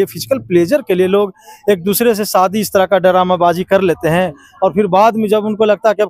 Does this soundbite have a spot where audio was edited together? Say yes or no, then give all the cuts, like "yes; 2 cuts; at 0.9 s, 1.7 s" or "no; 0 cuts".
no; 0 cuts